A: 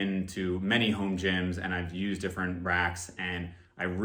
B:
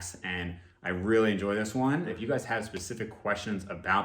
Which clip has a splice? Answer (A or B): B